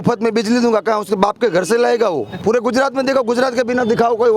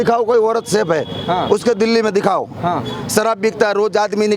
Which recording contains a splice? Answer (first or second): first